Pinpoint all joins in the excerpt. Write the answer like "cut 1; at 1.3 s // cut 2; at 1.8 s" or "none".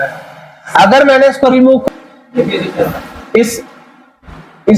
cut 1; at 1.8 s

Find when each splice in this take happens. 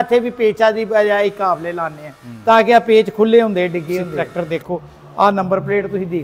cut 1; at 4.2 s

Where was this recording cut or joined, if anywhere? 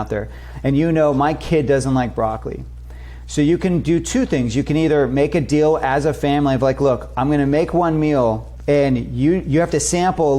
cut 1; at 8.5 s

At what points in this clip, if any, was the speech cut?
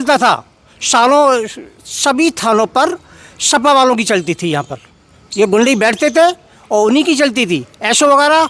none

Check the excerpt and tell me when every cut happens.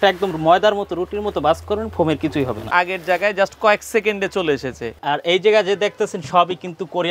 cut 1; at 2.7 s // cut 2; at 4.9 s

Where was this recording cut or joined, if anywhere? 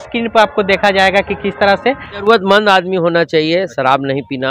cut 1; at 2.2 s

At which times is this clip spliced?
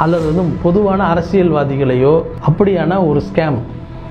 cut 1; at 2.3 s

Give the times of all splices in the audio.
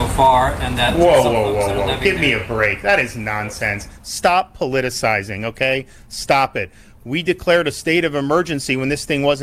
none

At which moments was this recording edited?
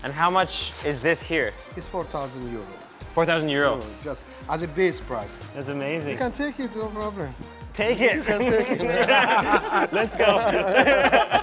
none

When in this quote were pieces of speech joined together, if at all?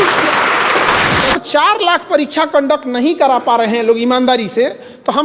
cut 1; at 1.3 s

